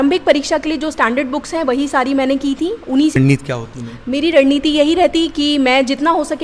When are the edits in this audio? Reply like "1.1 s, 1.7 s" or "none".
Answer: 3.1 s